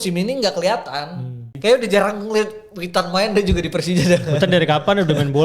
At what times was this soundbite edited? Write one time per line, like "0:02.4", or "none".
0:01.4